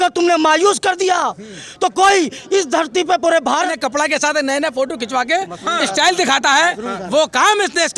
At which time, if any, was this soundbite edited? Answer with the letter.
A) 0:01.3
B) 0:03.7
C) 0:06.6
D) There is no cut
B